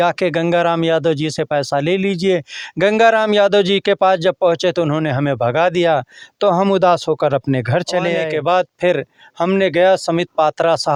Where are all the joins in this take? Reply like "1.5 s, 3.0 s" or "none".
none